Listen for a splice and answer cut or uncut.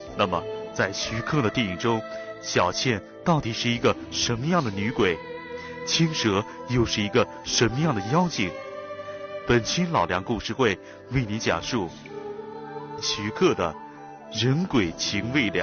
uncut